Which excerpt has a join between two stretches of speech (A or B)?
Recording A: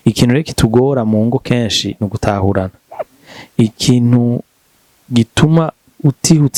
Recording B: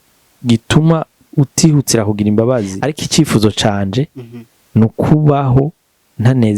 B